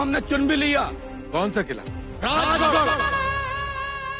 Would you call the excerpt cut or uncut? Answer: cut